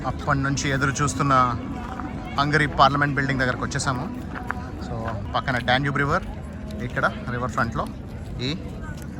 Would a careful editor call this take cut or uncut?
cut